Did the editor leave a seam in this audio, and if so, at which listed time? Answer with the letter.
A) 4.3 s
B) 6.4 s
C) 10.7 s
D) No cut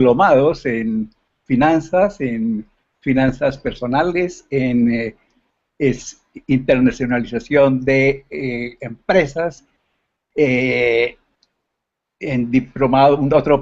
C